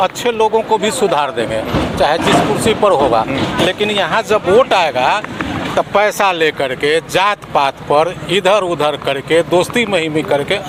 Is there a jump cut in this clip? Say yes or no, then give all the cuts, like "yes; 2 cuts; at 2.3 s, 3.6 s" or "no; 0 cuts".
no; 0 cuts